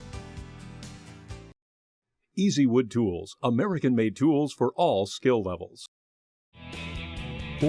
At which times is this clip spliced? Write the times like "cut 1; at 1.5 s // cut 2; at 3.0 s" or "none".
cut 1; at 1.2 s